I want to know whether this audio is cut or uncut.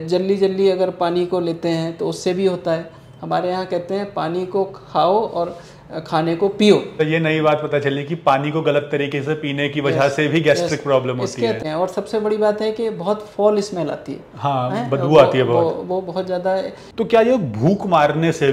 cut